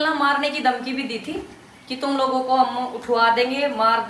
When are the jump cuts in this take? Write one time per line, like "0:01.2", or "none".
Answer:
none